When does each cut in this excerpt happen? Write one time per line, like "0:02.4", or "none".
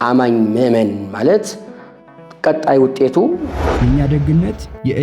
0:03.5